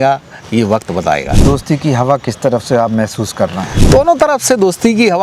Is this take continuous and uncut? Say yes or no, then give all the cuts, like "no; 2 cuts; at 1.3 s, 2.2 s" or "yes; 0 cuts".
no; 1 cut; at 3.8 s